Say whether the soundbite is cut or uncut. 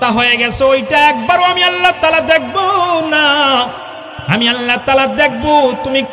uncut